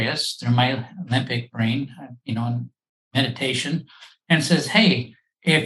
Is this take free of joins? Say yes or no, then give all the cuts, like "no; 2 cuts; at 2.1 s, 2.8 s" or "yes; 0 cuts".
yes; 0 cuts